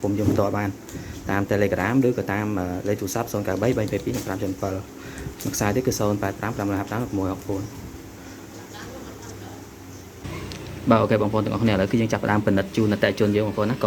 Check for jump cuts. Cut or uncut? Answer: cut